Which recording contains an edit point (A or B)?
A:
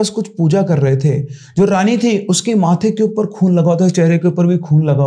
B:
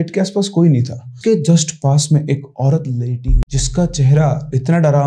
B